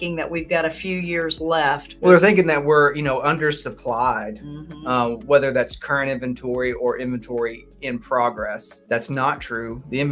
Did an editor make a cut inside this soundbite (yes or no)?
yes